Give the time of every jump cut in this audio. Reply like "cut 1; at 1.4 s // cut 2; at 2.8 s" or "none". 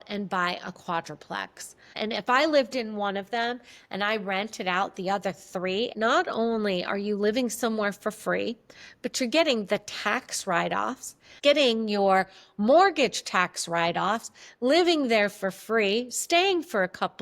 cut 1; at 1.9 s // cut 2; at 5.9 s // cut 3; at 11.3 s